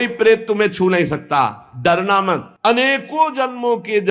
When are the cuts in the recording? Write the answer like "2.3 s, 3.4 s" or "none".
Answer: 2.5 s